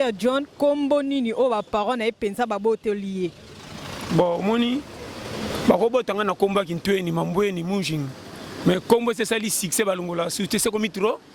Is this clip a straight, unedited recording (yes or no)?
yes